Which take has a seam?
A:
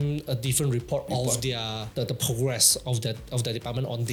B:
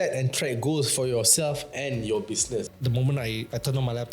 B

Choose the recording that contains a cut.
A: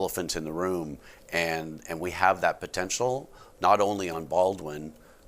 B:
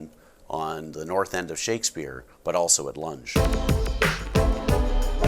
B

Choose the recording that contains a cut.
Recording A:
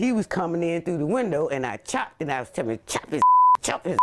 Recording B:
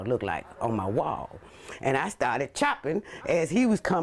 B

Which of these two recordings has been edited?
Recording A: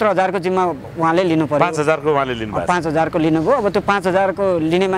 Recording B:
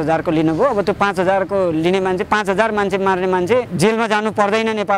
B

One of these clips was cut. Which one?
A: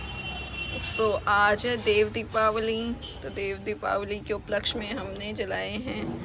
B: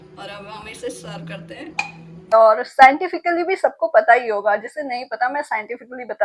B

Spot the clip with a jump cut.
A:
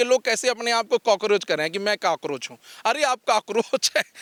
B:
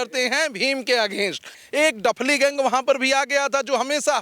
B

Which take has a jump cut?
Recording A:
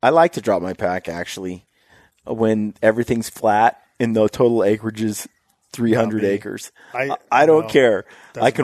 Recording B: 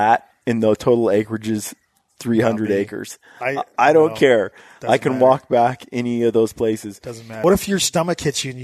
B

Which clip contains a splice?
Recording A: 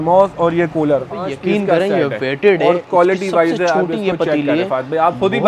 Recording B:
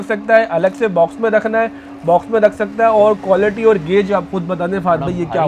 A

